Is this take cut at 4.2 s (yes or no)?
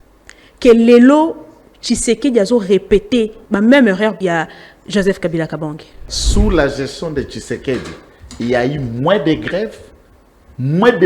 yes